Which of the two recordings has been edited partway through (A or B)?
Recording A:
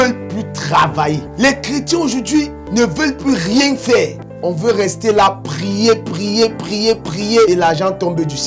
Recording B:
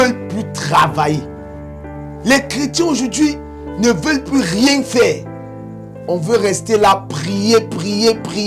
A